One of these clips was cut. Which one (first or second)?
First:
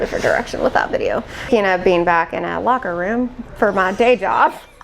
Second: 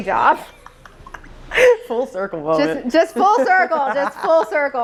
first